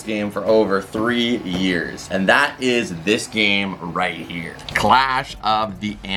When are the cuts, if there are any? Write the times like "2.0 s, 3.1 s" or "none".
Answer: none

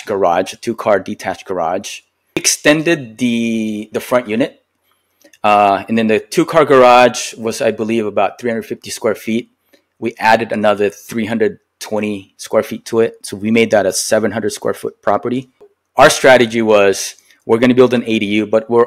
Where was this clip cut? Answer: 2.5 s, 15.7 s

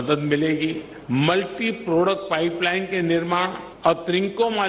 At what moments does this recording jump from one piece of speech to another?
0.9 s, 3.6 s

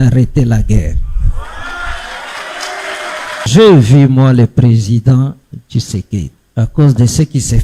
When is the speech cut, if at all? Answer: 3.5 s, 6.4 s

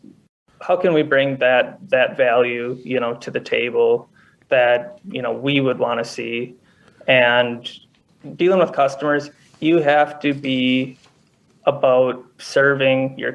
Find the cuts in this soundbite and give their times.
7.8 s

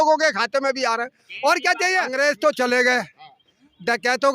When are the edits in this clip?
2.1 s

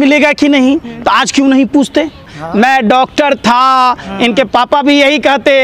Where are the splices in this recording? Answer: 2.4 s

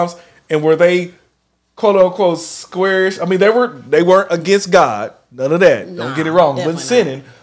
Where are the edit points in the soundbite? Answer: none

